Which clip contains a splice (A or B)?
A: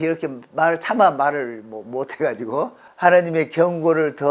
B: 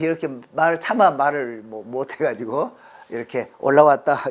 A